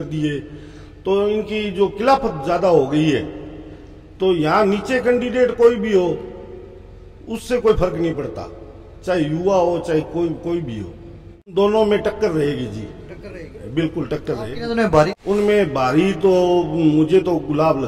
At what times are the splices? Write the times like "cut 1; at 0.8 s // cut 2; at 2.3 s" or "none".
cut 1; at 11.5 s // cut 2; at 15.2 s

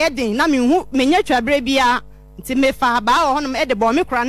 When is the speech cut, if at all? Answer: none

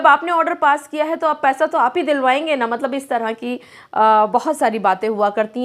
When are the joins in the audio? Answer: none

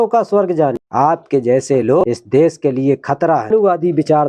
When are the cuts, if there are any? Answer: cut 1; at 0.8 s // cut 2; at 2.0 s // cut 3; at 3.5 s

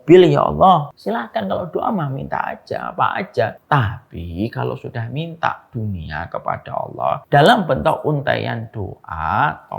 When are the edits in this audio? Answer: cut 1; at 0.9 s // cut 2; at 3.6 s // cut 3; at 7.2 s

